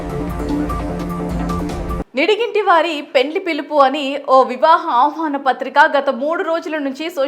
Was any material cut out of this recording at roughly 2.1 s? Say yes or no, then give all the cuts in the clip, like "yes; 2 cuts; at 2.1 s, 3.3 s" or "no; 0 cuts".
yes; 1 cut; at 2.1 s